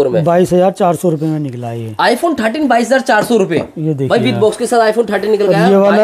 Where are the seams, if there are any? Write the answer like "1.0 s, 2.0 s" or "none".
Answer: none